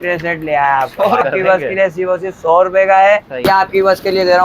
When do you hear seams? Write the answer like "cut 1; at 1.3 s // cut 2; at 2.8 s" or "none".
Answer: cut 1; at 1.2 s // cut 2; at 3.5 s

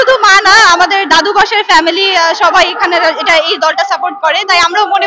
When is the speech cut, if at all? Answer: none

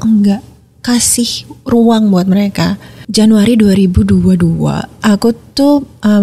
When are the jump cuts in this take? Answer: cut 1; at 3.0 s // cut 2; at 4.9 s

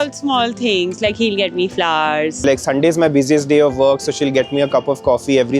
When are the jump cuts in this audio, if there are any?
cut 1; at 2.4 s

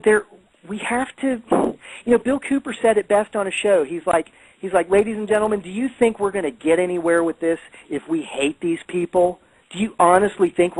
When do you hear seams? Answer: none

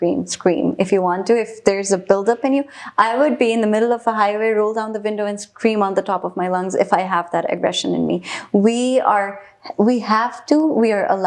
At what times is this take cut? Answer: none

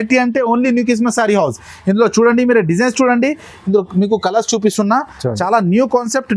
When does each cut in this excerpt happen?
none

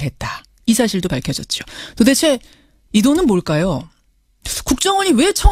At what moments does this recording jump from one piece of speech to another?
none

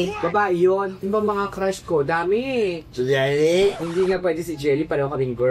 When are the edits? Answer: cut 1; at 0.9 s // cut 2; at 3.8 s

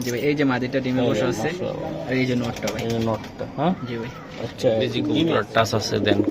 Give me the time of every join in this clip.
cut 1; at 5.0 s

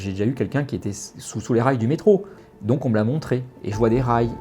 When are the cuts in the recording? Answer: cut 1; at 2.5 s

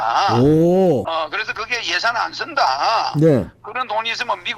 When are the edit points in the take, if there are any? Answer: cut 1; at 1.0 s

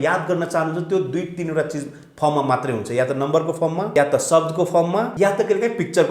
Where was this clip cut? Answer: cut 1; at 3.9 s // cut 2; at 5.1 s

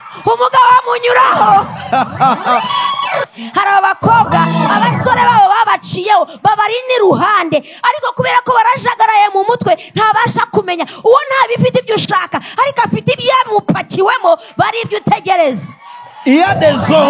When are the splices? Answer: cut 1; at 3.3 s

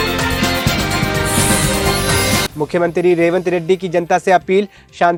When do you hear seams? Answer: none

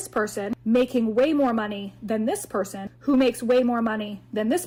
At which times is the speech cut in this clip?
none

